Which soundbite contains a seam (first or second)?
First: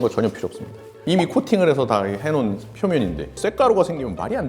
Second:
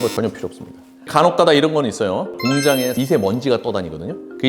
first